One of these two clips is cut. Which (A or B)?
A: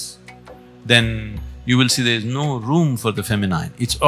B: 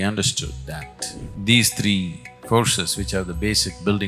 B